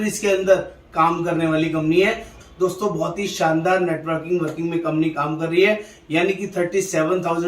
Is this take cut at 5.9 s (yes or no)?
no